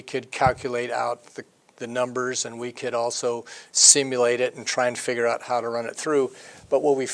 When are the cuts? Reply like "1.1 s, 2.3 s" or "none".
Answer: 2.8 s